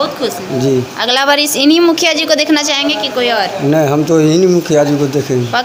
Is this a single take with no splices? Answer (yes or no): yes